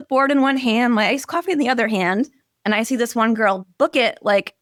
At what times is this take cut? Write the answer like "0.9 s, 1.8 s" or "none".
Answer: none